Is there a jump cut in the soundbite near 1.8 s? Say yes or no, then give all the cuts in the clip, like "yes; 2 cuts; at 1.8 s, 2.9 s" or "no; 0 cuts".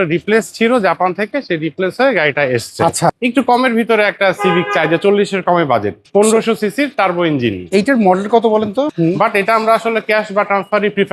no; 3 cuts; at 3.2 s, 6.0 s, 8.9 s